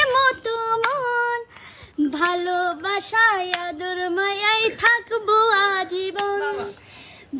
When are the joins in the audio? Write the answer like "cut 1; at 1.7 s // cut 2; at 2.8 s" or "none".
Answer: none